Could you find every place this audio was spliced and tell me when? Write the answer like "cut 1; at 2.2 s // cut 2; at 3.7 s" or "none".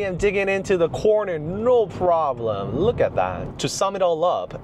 cut 1; at 3.5 s